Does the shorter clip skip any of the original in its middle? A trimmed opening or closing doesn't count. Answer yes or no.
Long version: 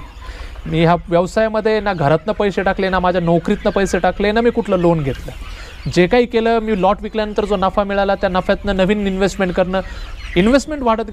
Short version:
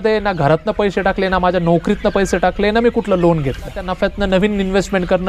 yes